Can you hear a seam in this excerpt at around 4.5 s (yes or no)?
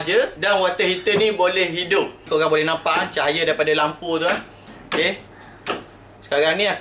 no